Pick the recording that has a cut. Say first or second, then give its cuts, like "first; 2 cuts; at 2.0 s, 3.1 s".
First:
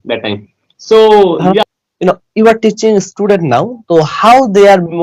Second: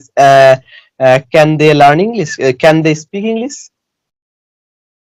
first; 1 cut; at 1.6 s